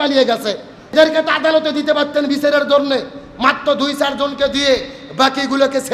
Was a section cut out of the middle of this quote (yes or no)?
yes